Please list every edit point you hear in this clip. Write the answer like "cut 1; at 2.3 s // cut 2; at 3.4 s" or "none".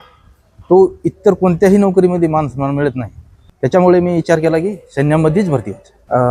none